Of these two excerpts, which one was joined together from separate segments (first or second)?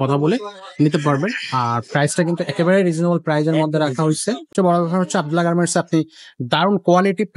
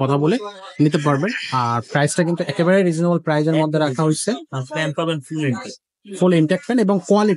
first